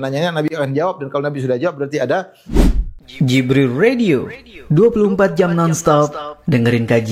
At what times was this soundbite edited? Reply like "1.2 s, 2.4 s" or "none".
2.4 s